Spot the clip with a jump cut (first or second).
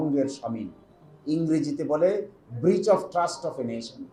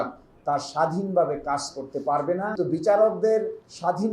second